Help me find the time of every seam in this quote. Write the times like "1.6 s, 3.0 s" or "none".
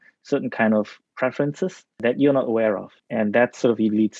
2.0 s, 2.9 s